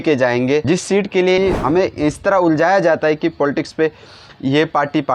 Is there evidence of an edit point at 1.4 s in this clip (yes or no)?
yes